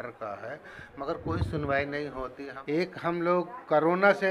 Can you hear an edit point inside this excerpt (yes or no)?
yes